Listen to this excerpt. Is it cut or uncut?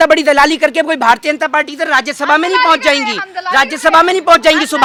uncut